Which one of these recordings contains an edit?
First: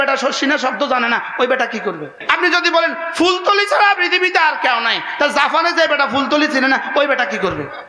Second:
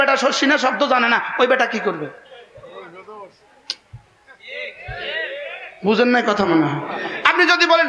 first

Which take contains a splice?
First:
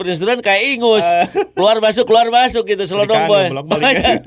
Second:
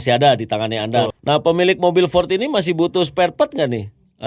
second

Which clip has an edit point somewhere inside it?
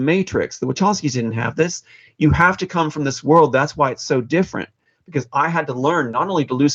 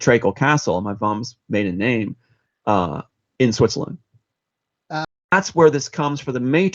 second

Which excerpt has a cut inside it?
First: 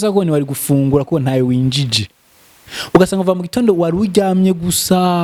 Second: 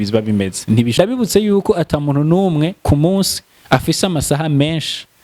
second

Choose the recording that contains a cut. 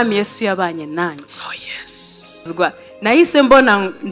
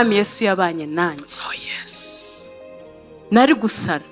first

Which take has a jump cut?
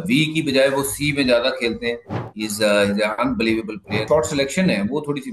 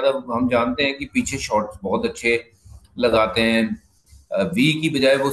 first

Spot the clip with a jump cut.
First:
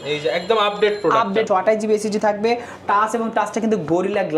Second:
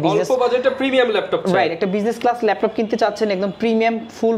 first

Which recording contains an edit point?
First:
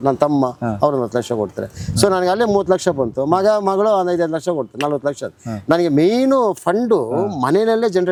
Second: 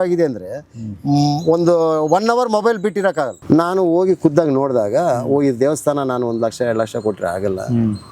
second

